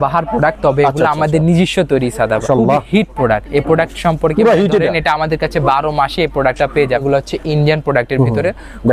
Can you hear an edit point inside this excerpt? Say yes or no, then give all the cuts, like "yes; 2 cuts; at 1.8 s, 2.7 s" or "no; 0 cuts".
yes; 2 cuts; at 2.4 s, 7.0 s